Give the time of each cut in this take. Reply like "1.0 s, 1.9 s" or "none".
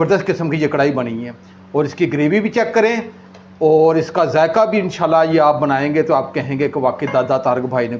none